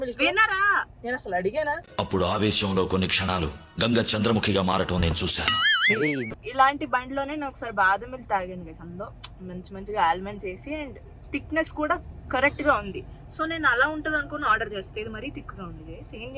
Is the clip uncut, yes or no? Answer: yes